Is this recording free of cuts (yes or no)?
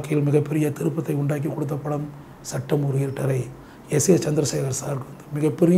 yes